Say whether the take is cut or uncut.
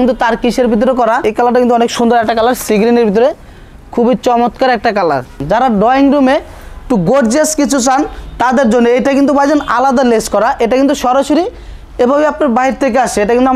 cut